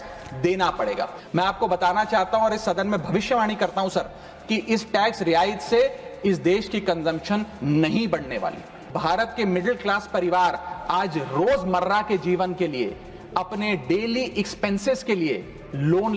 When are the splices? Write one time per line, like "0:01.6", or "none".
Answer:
0:01.2
0:08.9

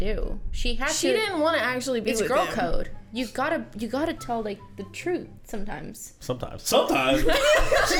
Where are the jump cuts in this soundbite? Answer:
none

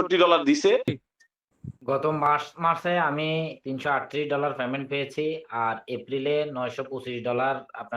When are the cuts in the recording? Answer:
0:01.1

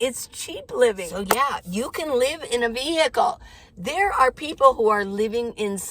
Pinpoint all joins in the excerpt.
0:01.1

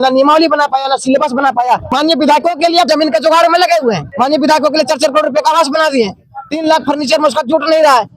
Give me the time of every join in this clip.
0:01.9
0:02.9
0:04.1

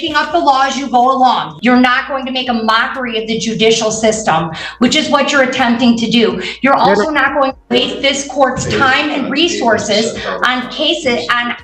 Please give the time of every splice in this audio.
0:01.5

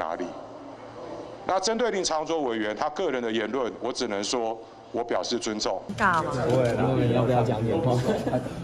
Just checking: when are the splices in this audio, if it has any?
0:05.9

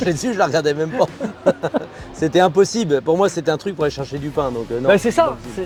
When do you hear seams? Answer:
none

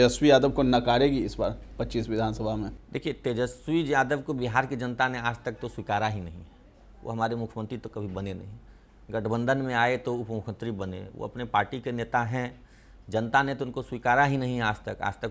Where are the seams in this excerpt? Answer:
none

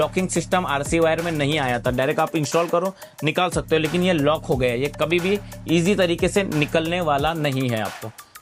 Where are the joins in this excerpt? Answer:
none

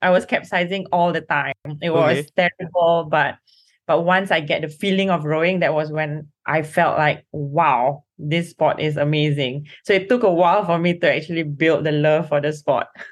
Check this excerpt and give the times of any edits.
none

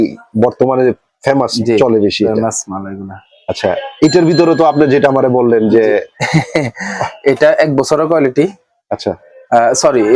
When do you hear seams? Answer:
none

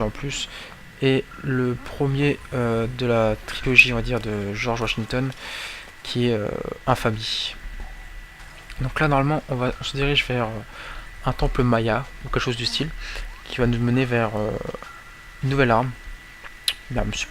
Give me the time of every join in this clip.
0:07.3

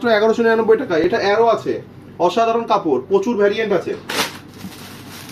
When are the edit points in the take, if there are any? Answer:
none

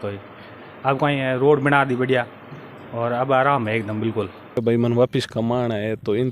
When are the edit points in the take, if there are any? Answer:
0:04.6

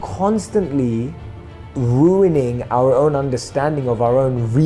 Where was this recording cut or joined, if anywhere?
none

